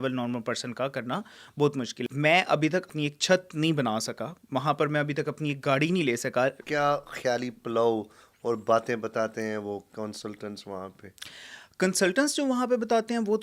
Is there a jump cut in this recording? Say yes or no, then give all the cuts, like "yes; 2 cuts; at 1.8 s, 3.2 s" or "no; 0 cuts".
yes; 3 cuts; at 2.0 s, 2.9 s, 6.6 s